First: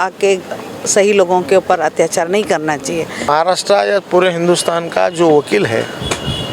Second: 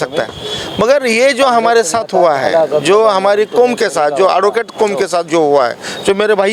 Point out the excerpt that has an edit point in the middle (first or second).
first